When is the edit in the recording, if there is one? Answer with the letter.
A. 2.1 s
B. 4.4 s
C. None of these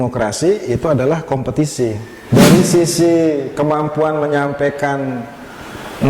A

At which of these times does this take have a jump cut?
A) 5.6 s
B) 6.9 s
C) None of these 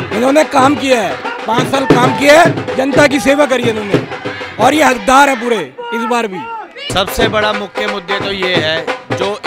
B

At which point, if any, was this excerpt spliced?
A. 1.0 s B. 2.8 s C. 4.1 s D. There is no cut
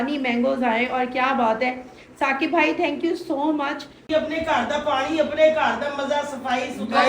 C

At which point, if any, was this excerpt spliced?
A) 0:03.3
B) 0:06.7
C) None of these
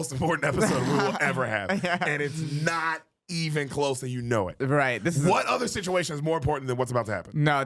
C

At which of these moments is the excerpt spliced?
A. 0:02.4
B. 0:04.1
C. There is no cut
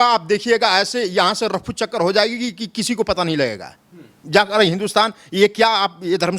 B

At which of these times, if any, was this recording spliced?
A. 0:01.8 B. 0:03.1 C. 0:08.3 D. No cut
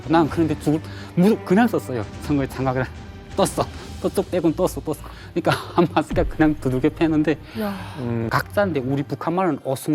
C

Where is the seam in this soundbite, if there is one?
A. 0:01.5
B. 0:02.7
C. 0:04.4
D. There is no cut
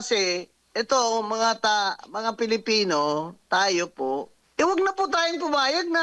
C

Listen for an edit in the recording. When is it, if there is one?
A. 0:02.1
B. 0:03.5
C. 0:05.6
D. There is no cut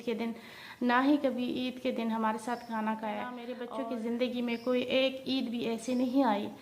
B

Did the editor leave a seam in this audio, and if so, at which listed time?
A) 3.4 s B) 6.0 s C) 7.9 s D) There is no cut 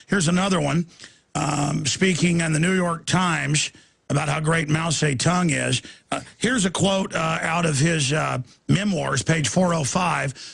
A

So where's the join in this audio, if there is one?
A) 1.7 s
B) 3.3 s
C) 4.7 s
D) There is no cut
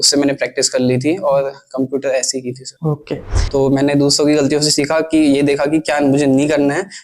B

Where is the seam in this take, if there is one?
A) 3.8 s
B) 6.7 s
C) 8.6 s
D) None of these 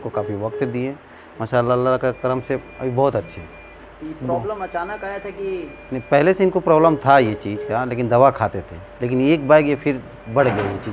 D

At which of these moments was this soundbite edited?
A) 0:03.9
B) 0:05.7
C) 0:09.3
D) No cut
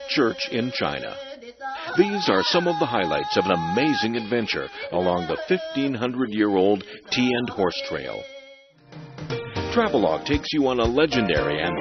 B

